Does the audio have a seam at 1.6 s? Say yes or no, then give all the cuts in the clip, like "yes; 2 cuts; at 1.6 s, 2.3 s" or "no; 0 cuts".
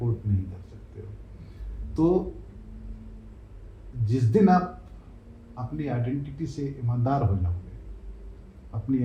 no; 0 cuts